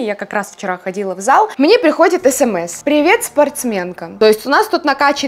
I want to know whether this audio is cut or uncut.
cut